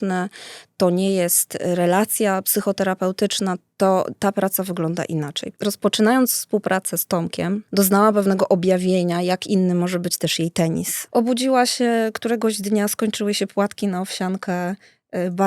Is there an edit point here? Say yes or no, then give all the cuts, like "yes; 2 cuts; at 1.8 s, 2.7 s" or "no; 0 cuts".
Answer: yes; 3 cuts; at 5.4 s, 7.7 s, 11.0 s